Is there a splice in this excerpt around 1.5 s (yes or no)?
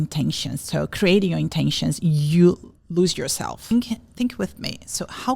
no